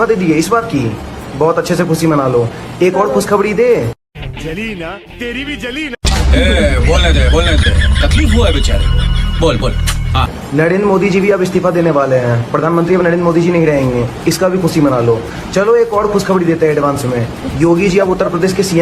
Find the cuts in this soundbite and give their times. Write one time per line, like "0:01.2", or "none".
none